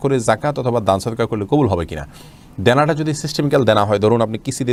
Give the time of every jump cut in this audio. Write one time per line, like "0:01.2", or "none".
none